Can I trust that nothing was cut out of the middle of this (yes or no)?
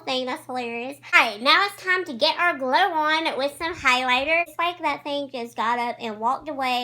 no